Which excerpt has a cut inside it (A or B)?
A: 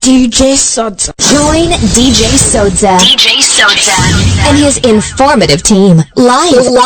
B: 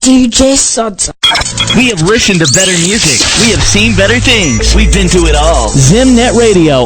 B